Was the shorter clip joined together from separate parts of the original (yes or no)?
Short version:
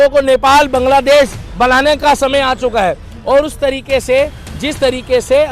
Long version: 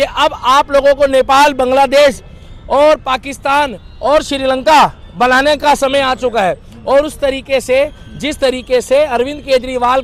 yes